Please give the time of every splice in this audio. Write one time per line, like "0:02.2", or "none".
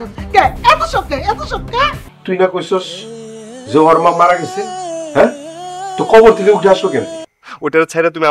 0:02.0
0:07.2